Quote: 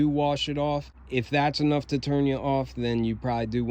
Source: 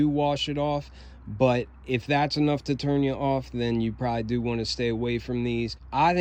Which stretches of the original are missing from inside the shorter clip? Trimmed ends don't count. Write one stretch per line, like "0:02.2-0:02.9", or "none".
0:01.0-0:01.8